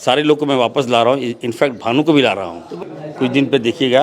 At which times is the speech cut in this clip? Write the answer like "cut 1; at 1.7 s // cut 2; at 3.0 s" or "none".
cut 1; at 2.6 s